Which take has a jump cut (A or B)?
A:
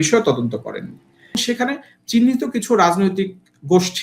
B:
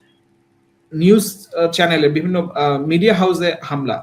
A